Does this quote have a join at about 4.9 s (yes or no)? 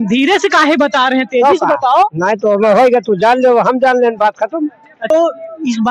yes